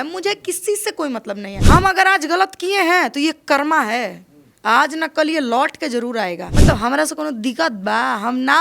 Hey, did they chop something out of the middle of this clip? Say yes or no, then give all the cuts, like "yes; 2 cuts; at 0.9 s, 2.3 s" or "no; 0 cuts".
yes; 2 cuts; at 1.5 s, 6.5 s